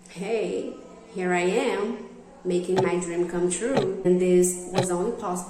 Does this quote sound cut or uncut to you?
cut